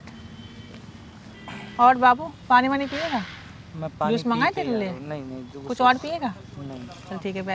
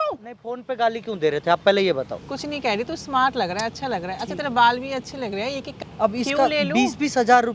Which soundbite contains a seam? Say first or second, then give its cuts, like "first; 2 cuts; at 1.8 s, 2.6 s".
second; 2 cuts; at 2.2 s, 5.8 s